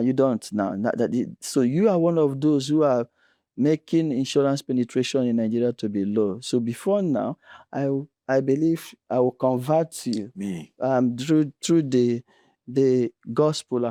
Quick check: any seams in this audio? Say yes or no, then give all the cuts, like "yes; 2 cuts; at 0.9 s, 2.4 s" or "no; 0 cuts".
no; 0 cuts